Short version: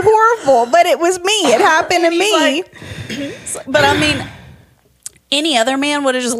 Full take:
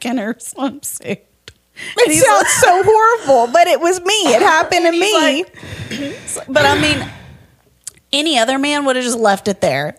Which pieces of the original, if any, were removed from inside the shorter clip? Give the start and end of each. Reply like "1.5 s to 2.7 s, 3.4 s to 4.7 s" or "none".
none